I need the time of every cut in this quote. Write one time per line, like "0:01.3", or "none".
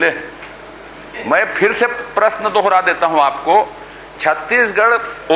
none